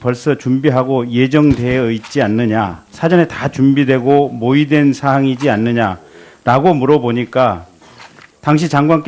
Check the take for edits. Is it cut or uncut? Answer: cut